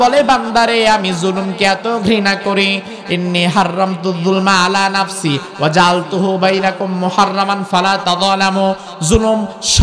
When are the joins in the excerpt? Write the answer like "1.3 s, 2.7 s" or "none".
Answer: none